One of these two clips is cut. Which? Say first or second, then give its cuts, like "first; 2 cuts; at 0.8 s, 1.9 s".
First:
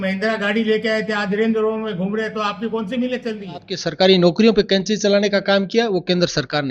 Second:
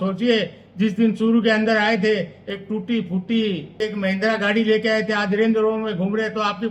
first; 1 cut; at 3.8 s